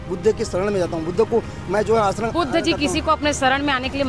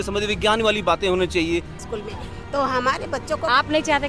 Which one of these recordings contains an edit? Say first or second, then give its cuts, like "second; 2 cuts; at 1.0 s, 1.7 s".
second; 1 cut; at 1.9 s